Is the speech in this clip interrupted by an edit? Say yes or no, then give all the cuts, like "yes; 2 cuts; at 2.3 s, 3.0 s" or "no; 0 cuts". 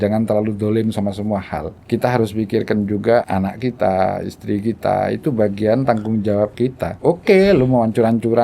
yes; 3 cuts; at 1.8 s, 3.3 s, 6.9 s